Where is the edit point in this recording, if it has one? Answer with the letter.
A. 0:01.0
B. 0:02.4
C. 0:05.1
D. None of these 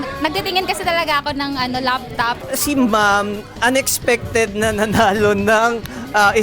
B